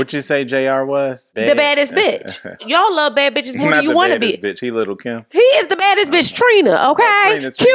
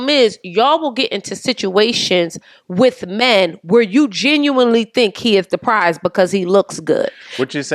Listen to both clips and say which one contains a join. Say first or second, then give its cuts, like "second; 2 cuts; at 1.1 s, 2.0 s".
first; 2 cuts; at 1.2 s, 2.7 s